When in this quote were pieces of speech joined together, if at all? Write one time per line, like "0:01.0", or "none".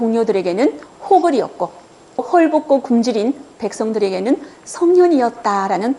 none